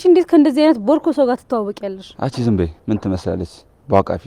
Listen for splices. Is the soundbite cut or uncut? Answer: cut